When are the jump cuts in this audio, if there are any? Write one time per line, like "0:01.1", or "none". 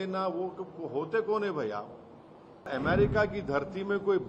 0:02.7